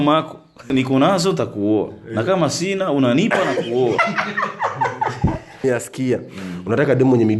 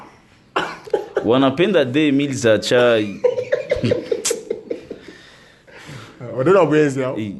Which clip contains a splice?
first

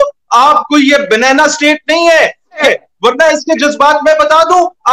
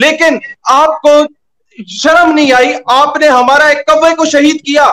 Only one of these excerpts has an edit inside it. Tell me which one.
first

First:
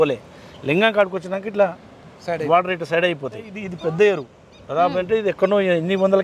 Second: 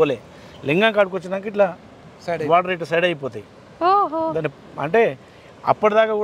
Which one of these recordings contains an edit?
first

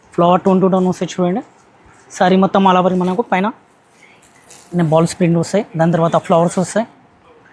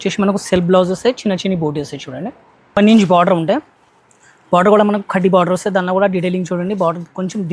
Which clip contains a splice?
second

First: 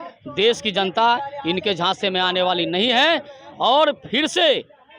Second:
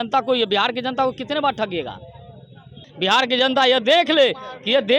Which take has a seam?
second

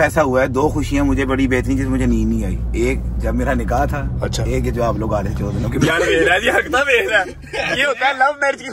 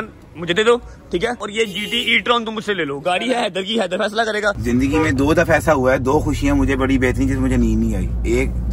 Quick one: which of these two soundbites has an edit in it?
second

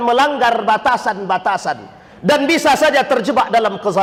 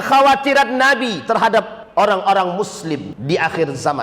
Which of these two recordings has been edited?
second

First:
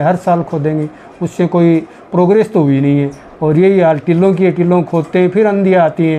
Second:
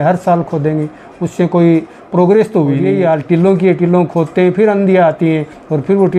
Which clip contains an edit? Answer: second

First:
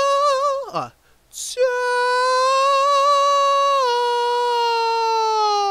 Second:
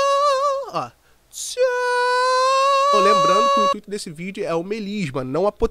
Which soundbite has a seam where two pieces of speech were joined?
second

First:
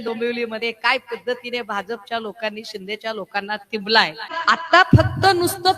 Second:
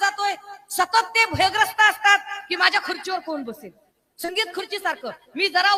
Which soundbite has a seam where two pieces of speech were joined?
first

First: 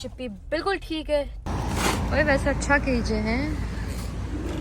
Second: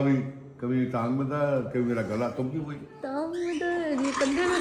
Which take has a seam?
first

